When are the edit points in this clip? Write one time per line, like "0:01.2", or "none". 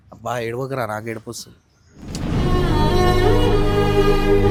none